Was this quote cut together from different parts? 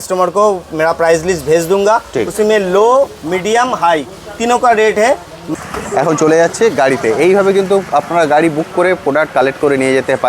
yes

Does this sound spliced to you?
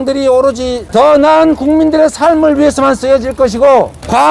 no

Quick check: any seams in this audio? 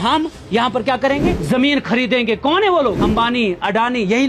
yes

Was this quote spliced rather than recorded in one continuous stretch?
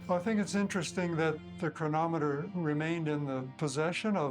yes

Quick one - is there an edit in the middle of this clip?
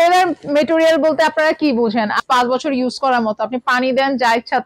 yes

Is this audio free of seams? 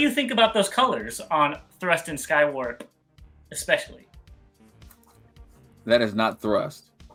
yes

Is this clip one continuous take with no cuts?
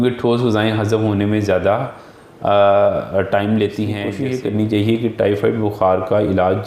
no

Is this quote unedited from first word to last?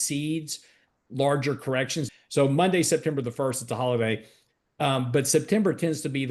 no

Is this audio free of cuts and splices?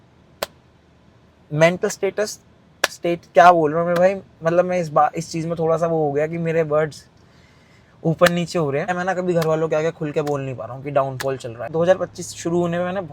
no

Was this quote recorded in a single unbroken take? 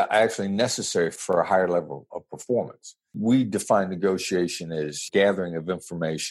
no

